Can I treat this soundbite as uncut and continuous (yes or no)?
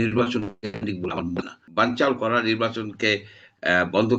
no